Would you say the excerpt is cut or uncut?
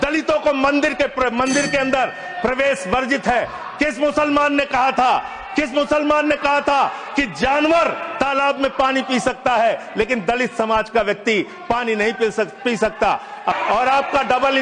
cut